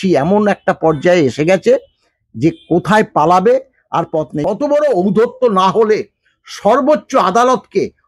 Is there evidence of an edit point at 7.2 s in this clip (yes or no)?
no